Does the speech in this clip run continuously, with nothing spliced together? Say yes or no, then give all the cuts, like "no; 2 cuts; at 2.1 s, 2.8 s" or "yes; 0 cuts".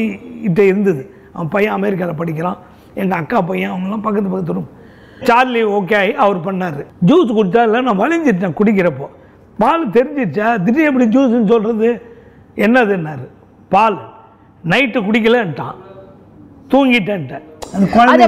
no; 1 cut; at 6.8 s